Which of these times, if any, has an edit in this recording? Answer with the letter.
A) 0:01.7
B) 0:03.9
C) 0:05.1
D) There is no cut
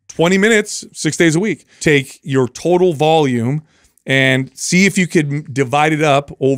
A